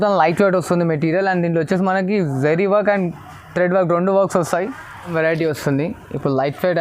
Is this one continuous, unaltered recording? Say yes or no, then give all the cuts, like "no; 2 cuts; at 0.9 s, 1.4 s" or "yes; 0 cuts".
no; 1 cut; at 5.1 s